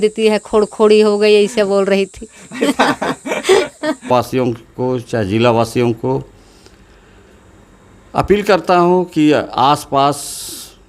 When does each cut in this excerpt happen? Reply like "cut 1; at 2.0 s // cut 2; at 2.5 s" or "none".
cut 1; at 4.1 s